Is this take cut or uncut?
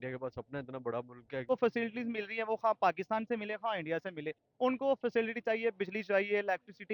cut